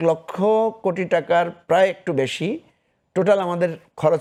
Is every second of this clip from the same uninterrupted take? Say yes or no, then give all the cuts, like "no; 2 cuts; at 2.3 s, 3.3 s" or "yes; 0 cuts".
yes; 0 cuts